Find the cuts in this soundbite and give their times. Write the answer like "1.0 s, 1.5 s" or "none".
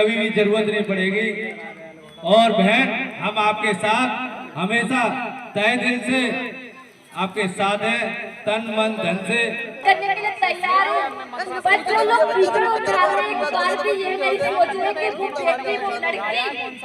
9.8 s